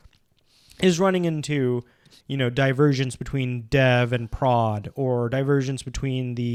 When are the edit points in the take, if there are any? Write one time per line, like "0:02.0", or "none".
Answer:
none